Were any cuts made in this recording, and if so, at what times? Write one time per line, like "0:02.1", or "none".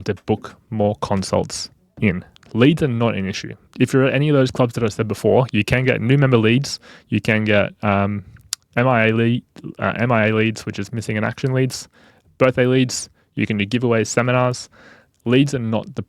0:02.3